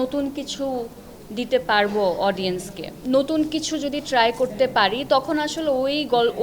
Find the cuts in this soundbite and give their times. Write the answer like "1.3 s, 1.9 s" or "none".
2.9 s